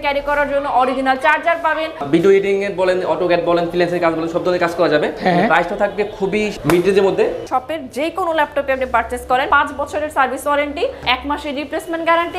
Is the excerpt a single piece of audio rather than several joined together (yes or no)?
no